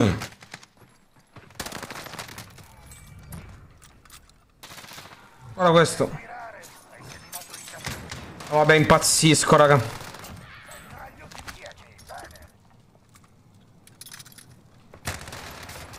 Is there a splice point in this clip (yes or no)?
yes